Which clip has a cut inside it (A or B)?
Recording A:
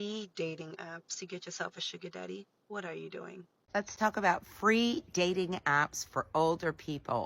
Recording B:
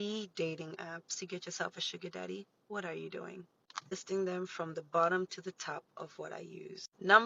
A